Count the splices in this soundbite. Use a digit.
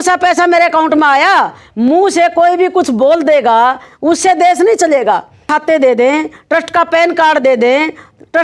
1